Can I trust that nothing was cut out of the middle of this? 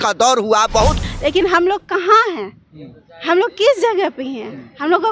no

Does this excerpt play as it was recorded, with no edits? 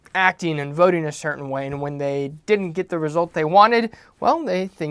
yes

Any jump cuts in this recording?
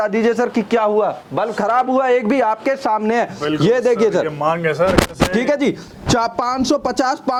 no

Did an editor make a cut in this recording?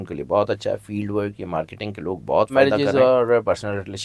yes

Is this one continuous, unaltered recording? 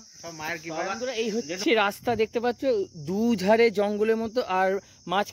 no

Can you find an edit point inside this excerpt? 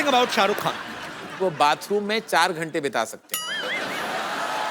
yes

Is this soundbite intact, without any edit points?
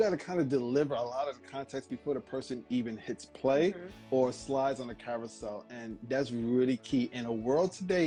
yes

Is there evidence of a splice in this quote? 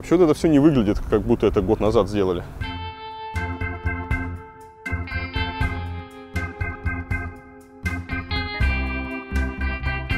no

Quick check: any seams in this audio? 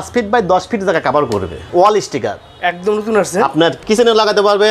yes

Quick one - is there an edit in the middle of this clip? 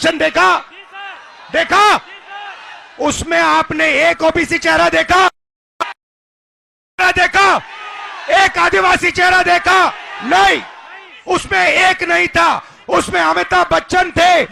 no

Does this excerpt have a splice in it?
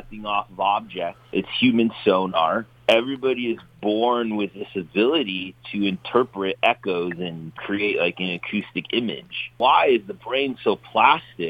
yes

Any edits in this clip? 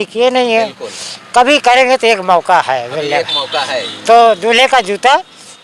no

